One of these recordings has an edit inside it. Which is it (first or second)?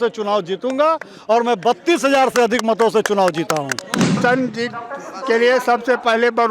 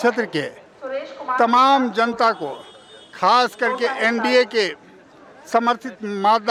first